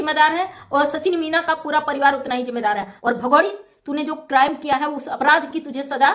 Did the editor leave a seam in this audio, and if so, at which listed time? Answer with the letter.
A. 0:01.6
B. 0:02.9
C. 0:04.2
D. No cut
B